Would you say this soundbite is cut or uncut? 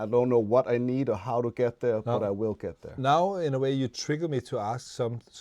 cut